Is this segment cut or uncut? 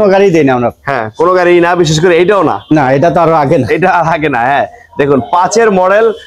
uncut